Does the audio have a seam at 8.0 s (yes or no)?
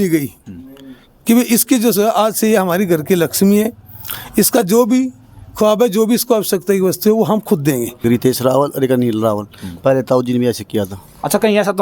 yes